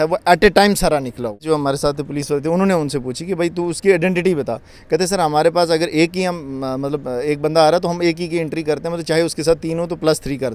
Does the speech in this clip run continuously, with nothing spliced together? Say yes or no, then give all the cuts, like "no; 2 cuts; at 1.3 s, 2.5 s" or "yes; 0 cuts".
no; 1 cut; at 1.4 s